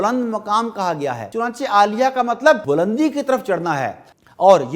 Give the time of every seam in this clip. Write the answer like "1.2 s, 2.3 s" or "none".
1.2 s, 2.6 s